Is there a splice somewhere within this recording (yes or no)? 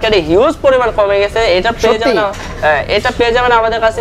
no